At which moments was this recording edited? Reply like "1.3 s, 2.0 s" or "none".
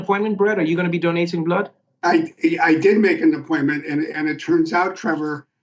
none